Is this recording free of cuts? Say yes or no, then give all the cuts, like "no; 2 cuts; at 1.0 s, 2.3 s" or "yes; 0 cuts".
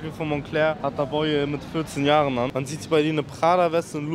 no; 2 cuts; at 0.8 s, 2.5 s